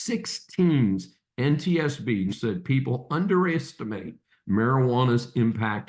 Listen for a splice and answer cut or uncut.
cut